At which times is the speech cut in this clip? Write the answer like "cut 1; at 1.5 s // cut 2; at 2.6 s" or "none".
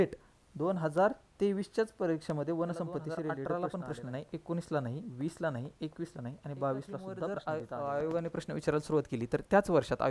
cut 1; at 3.4 s // cut 2; at 7.3 s